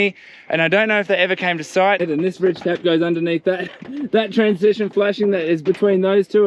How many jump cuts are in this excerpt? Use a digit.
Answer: 1